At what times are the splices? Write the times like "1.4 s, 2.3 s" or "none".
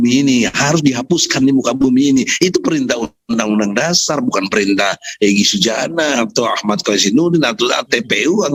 none